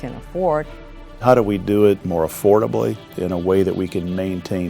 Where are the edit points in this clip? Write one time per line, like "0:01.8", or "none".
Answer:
0:01.1
0:02.1
0:03.1